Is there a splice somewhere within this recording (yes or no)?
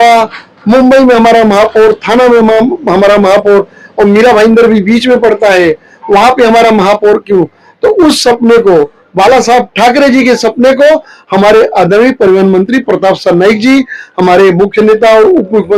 no